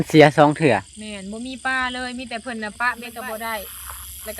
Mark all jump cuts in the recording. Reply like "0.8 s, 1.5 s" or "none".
2.8 s